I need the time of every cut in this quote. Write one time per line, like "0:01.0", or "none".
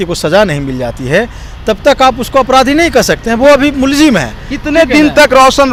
none